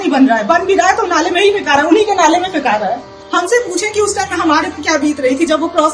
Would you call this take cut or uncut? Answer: cut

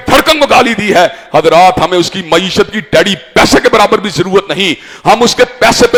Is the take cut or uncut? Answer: uncut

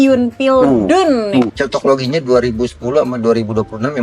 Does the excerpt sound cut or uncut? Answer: cut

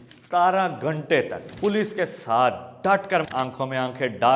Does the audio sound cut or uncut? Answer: cut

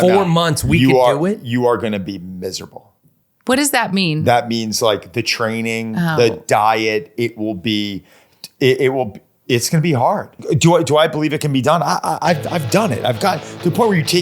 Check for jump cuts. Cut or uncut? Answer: cut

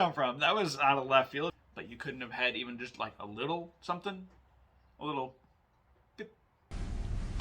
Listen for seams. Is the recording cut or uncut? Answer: cut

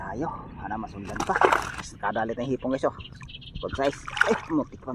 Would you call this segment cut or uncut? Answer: cut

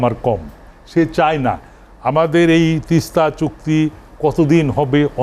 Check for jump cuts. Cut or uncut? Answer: uncut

